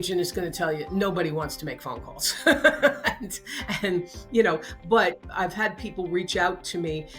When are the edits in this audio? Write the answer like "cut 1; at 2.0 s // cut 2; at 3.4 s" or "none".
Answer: cut 1; at 4.8 s

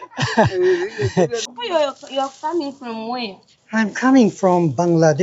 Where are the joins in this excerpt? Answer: cut 1; at 1.5 s

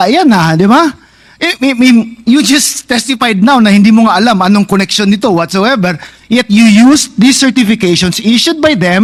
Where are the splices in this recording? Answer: none

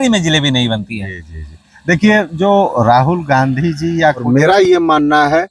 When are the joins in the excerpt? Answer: cut 1; at 4.2 s

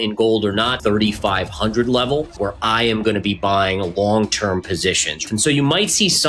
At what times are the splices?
cut 1; at 0.8 s // cut 2; at 2.3 s // cut 3; at 5.2 s

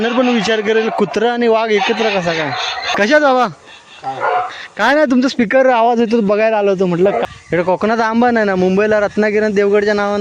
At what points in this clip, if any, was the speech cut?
cut 1; at 2.9 s // cut 2; at 7.2 s

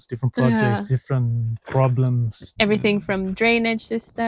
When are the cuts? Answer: none

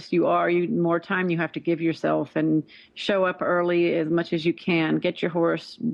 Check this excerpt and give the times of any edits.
none

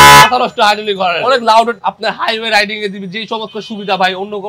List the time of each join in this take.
cut 1; at 1.2 s // cut 2; at 1.8 s

